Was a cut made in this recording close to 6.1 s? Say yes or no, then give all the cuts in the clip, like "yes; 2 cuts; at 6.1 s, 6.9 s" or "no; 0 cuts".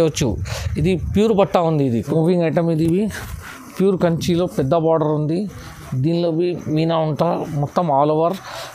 no; 1 cut; at 2.1 s